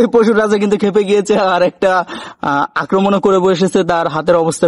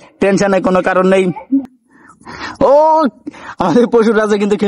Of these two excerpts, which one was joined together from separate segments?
second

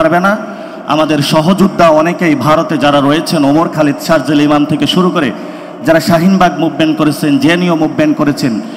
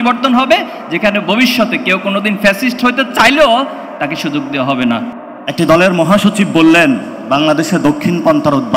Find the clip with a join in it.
second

